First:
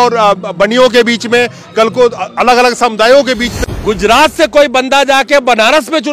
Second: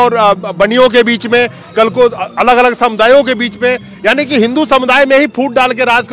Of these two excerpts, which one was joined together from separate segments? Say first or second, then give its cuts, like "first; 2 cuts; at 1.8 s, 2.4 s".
first; 1 cut; at 3.5 s